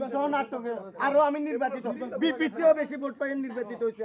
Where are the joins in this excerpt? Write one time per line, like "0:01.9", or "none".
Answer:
none

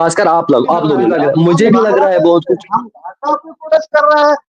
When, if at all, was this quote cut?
0:01.1

